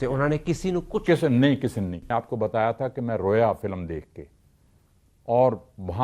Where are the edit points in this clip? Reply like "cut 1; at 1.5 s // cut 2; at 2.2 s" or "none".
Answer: cut 1; at 2.0 s